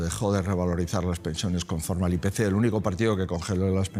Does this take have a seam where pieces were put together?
no; 0 cuts

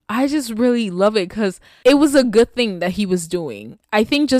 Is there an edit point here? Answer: yes; 1 cut; at 1.6 s

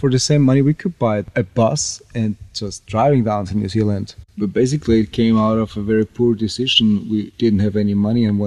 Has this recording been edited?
yes; 2 cuts; at 1.3 s, 4.3 s

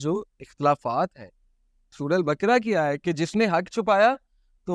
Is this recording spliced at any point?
yes; 1 cut; at 1.9 s

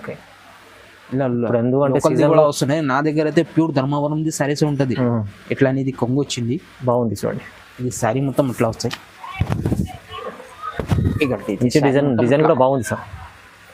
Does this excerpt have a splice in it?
no; 0 cuts

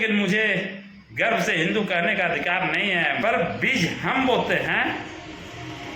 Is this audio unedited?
no; 1 cut; at 3.2 s

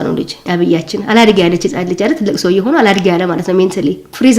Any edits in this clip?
no; 0 cuts

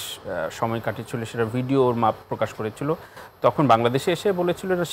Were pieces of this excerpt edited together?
no; 0 cuts

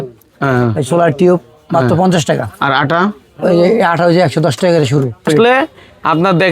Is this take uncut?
no; 1 cut; at 5.2 s

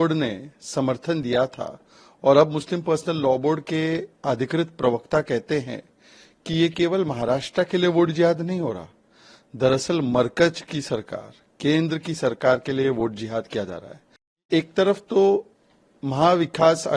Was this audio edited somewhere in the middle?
yes; 1 cut; at 14.5 s

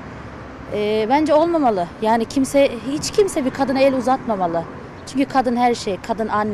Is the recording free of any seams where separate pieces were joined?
yes; 0 cuts

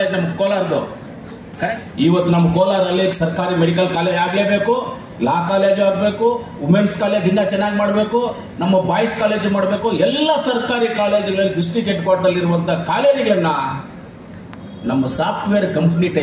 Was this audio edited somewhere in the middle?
yes; 1 cut; at 1.7 s

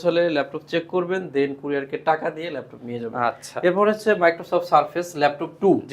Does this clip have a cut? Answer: no; 0 cuts

